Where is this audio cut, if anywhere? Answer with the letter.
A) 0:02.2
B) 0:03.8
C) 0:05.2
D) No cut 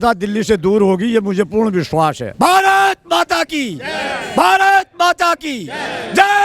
A